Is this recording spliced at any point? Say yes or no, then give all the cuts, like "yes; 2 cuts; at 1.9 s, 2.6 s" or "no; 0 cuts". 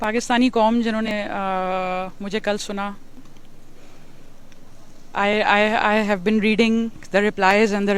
yes; 1 cut; at 1.1 s